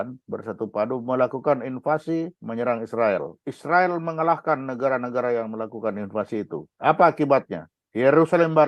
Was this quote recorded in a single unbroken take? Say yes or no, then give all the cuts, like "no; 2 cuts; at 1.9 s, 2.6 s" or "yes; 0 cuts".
no; 2 cuts; at 3.5 s, 6.7 s